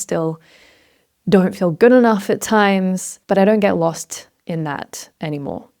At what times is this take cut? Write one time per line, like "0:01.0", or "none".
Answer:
0:03.1